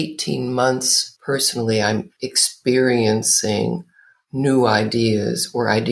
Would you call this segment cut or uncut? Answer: cut